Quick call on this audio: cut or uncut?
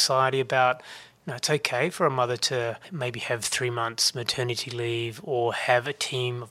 cut